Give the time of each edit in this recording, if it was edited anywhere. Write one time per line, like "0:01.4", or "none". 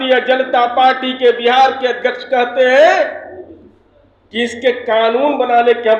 none